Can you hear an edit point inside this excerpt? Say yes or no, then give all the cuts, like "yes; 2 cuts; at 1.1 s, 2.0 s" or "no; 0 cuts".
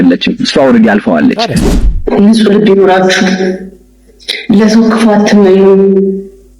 yes; 1 cut; at 1.6 s